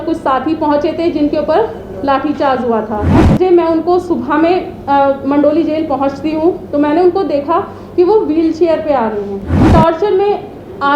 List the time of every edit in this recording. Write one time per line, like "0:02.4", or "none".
0:03.2
0:09.6